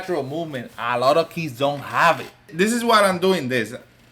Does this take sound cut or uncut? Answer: cut